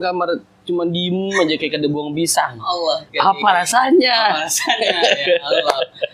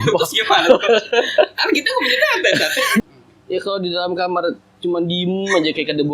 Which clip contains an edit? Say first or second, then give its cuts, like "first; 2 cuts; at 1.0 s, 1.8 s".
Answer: second; 1 cut; at 3.0 s